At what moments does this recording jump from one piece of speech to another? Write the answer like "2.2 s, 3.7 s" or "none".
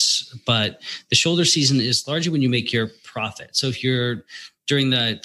none